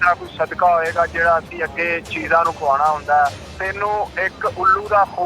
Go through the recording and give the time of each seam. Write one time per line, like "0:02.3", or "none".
0:03.5